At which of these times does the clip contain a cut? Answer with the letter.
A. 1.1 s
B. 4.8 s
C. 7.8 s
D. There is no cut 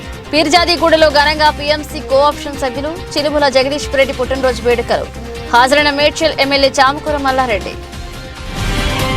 C